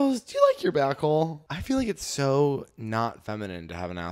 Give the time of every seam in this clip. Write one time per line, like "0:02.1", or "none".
0:01.5